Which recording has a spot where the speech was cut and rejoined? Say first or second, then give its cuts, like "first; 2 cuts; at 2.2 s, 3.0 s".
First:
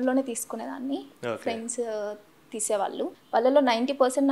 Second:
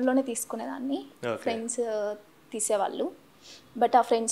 first; 1 cut; at 3.2 s